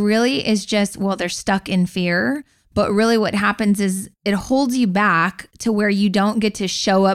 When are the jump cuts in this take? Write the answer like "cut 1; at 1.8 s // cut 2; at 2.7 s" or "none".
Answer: none